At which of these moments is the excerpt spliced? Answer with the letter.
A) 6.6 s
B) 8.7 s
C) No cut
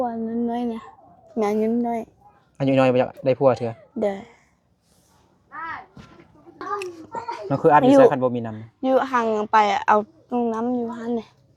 A